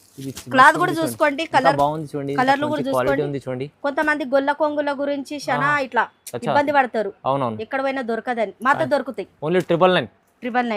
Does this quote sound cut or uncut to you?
uncut